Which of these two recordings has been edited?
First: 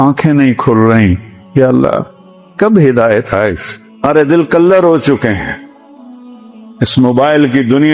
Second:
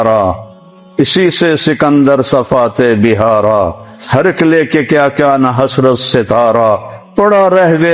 first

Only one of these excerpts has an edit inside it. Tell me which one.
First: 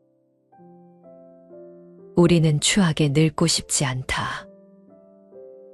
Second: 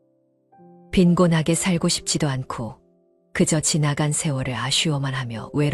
second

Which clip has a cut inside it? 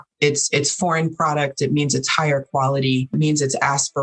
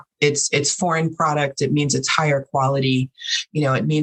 first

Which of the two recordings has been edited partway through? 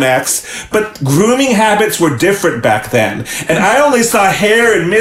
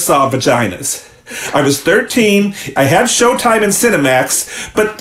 second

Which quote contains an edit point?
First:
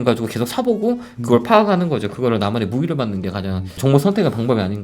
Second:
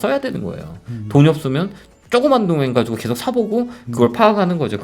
first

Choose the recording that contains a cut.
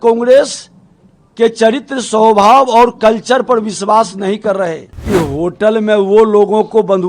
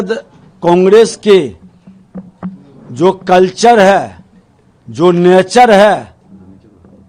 first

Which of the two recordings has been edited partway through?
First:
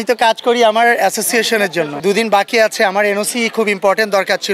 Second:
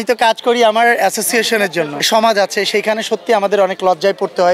second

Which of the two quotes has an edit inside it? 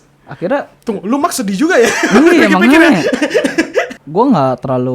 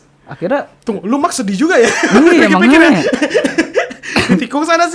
first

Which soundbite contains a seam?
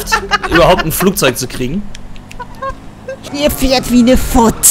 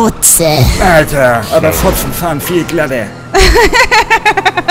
first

